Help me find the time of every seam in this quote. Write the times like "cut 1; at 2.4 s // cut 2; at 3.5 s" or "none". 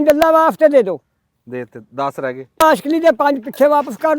cut 1; at 2.6 s